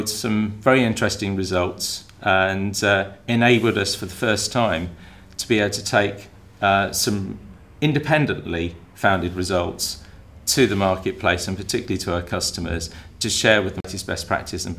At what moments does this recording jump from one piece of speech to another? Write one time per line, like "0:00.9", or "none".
0:13.8